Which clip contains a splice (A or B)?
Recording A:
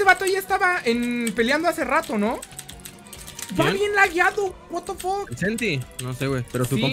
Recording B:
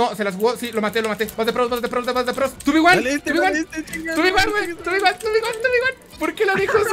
B